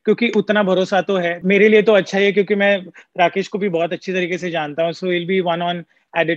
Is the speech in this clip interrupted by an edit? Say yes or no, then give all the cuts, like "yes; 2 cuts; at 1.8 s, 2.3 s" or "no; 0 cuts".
yes; 1 cut; at 1.4 s